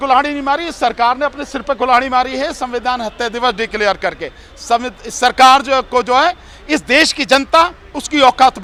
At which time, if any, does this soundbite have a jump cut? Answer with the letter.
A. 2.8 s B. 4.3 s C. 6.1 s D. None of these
D